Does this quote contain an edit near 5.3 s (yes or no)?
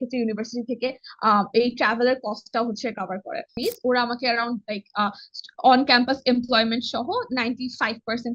no